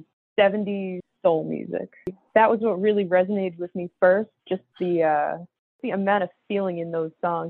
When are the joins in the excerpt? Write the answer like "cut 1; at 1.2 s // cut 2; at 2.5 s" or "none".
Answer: cut 1; at 2.2 s // cut 2; at 5.8 s

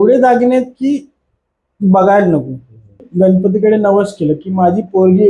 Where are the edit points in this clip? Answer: cut 1; at 3.1 s

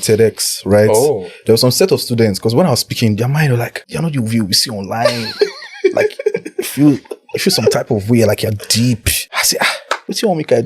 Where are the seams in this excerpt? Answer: cut 1; at 3.8 s // cut 2; at 9.7 s

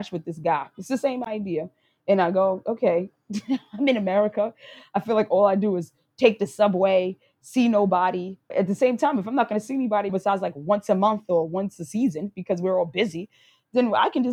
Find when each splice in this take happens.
cut 1; at 8.4 s // cut 2; at 10.1 s

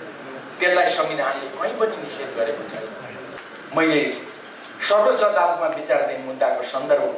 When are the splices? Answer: cut 1; at 3.4 s

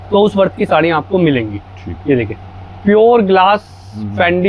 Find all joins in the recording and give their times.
none

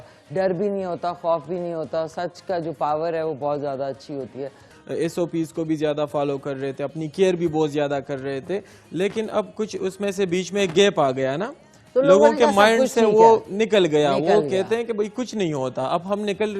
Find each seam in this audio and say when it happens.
cut 1; at 4.7 s

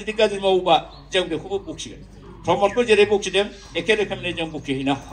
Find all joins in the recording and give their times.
none

